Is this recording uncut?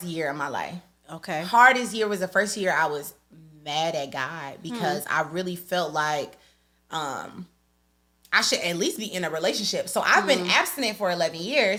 yes; 0 cuts

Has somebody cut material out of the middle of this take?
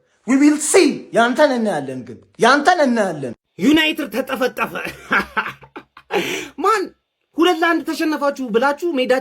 yes; 1 cut; at 3.3 s

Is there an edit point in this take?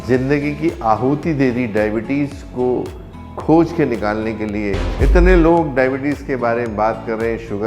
yes; 1 cut; at 4.9 s

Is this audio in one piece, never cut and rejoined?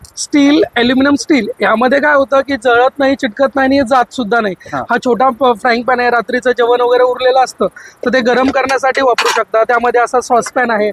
yes; 0 cuts

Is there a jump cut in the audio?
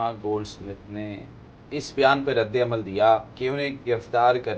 yes; 1 cut; at 3.3 s

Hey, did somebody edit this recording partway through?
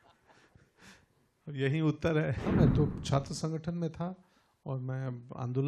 yes; 1 cut; at 2.4 s

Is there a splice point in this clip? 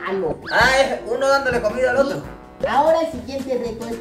yes; 1 cut; at 2.5 s

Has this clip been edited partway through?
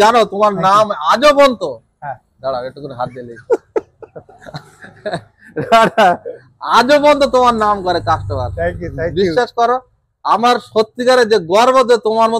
no; 0 cuts

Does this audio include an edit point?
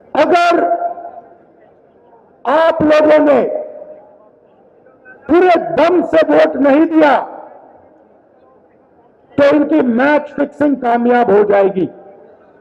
no; 0 cuts

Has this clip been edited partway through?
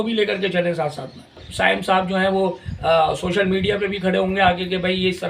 yes; 1 cut; at 1.5 s

